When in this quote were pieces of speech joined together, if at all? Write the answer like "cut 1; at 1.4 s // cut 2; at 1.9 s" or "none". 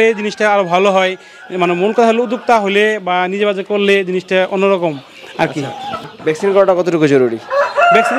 cut 1; at 5.9 s

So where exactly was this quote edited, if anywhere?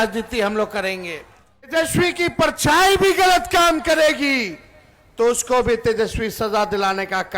cut 1; at 1.7 s

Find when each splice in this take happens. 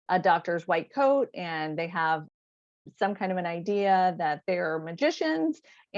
none

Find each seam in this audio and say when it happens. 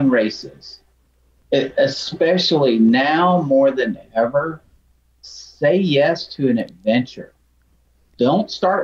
cut 1; at 1.1 s // cut 2; at 7.5 s

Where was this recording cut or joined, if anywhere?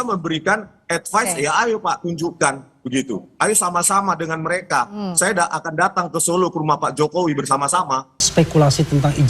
cut 1; at 8.3 s

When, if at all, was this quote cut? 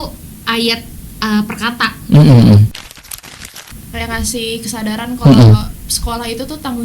cut 1; at 3.3 s

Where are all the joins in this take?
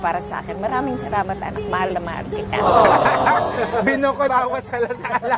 cut 1; at 4.3 s

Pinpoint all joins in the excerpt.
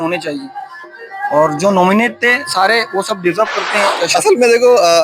cut 1; at 4.1 s

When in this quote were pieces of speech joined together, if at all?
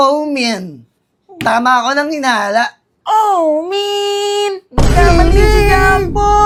none

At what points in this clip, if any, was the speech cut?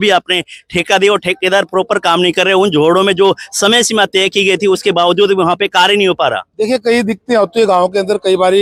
none

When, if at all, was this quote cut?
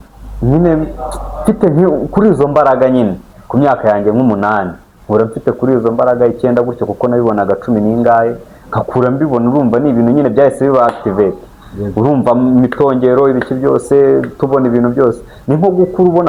none

